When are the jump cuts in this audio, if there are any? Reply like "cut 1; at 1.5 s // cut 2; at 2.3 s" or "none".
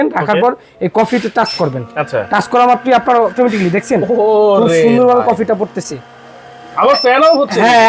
none